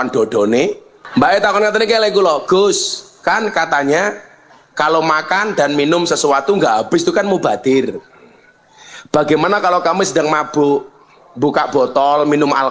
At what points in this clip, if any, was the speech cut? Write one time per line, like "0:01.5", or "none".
0:00.9